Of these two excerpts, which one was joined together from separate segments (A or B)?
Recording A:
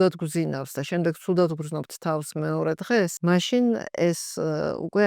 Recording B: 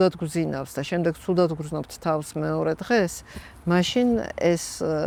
A